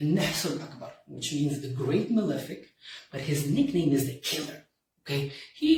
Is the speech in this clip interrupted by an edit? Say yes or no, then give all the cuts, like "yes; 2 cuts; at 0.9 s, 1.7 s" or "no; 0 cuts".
no; 0 cuts